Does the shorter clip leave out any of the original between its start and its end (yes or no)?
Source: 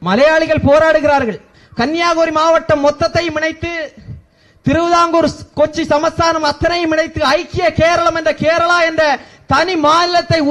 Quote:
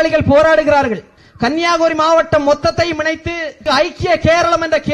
yes